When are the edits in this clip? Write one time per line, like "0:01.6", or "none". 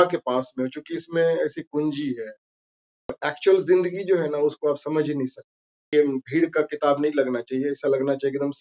0:03.2
0:05.9